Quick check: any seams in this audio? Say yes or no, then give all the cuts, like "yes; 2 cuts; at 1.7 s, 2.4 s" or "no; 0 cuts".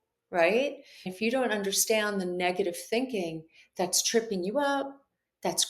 yes; 1 cut; at 1.0 s